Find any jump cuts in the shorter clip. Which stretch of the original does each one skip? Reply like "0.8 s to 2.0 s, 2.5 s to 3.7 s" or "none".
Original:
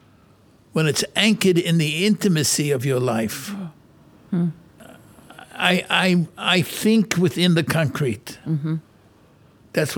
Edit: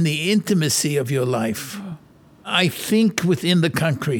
4.2 s to 6.4 s